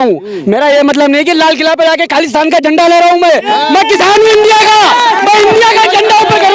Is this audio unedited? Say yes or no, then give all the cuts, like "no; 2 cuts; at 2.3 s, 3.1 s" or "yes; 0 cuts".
yes; 0 cuts